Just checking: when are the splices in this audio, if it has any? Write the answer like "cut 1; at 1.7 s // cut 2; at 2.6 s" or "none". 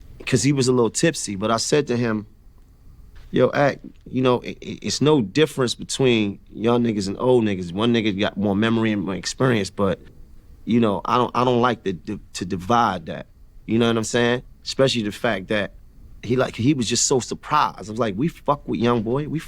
cut 1; at 11.0 s // cut 2; at 14.3 s